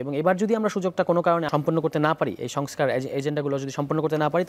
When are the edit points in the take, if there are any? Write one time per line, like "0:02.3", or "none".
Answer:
0:01.5